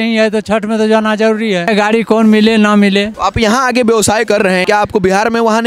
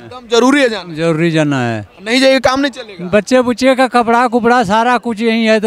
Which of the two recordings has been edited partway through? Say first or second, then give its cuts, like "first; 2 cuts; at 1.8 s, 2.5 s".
first; 3 cuts; at 1.7 s, 3.1 s, 4.6 s